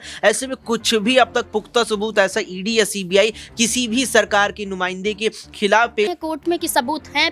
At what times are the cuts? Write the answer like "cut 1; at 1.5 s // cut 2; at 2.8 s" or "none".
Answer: cut 1; at 6.1 s